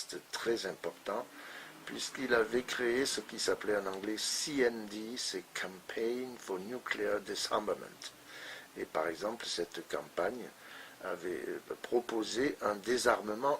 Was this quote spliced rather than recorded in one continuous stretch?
yes; 1 cut; at 7.9 s

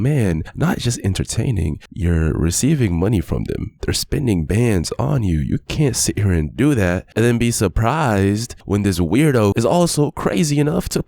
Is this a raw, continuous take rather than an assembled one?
no; 1 cut; at 9.6 s

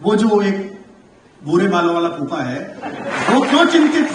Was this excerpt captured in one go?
no; 1 cut; at 3.1 s

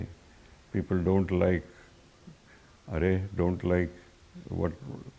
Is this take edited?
no; 0 cuts

